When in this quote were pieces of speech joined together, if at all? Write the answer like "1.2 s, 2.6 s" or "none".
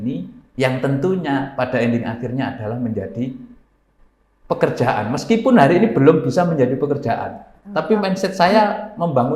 none